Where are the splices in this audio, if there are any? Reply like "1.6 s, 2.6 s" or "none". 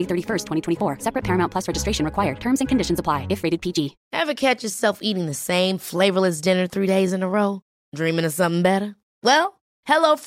4.0 s

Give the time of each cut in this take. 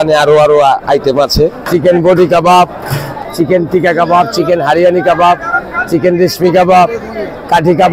1.6 s

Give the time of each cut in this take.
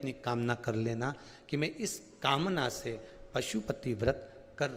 none

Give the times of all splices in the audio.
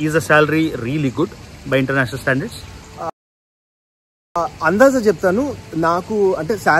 none

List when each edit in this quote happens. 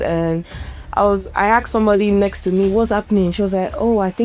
2.7 s

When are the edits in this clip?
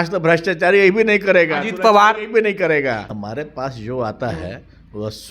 3.2 s

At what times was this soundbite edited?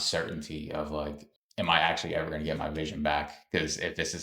none

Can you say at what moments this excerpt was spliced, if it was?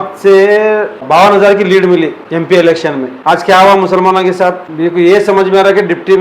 1.0 s, 2.2 s, 3.1 s, 4.7 s

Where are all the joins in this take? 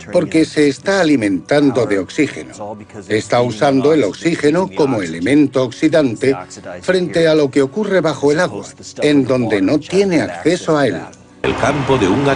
none

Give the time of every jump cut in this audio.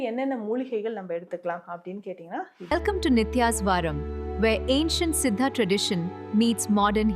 2.6 s

